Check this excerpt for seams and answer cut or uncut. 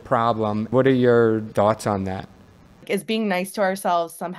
cut